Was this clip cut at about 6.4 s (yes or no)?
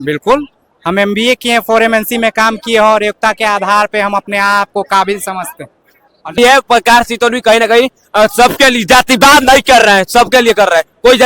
yes